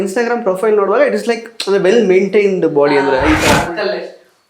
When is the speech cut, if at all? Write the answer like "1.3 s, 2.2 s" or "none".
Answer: 3.5 s